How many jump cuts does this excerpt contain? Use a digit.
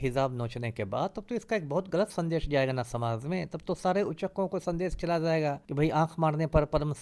1